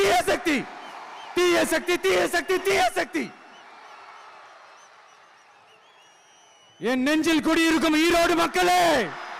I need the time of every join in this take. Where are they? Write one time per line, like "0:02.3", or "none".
none